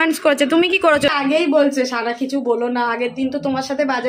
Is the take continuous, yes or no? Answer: no